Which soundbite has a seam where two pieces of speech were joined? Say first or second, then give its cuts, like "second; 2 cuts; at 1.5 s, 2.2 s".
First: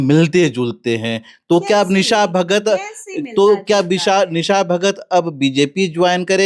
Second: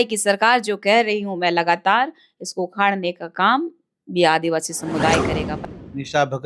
second; 1 cut; at 5.4 s